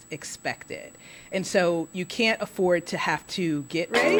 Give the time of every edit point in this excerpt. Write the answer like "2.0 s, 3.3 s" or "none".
none